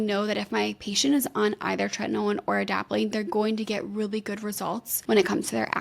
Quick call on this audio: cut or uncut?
cut